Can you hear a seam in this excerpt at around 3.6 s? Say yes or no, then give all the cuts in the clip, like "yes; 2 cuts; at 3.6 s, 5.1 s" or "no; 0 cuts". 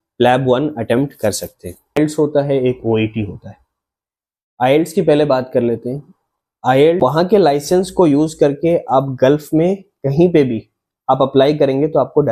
no; 2 cuts; at 2.0 s, 7.0 s